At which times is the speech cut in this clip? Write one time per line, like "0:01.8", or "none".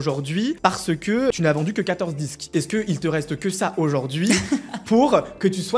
0:01.0